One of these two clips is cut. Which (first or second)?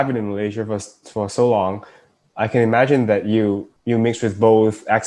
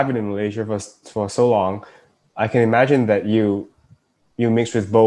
first